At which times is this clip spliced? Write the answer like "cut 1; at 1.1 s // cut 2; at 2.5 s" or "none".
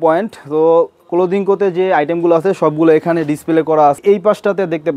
cut 1; at 4.0 s